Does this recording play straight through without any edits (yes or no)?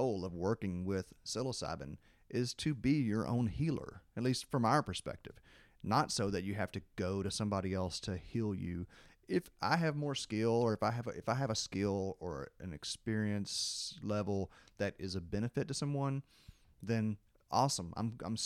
yes